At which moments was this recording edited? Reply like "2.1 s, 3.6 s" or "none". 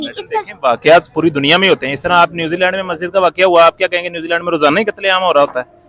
none